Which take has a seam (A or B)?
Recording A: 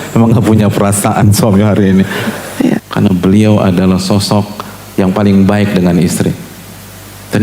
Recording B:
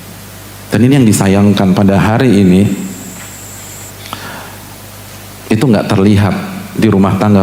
A